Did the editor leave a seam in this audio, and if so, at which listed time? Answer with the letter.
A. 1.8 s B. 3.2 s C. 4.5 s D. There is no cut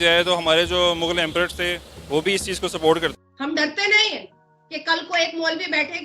B